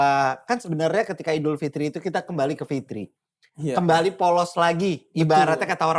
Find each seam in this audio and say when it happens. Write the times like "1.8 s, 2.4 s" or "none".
none